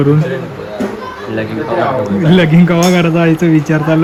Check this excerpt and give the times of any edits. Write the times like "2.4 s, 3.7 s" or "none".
none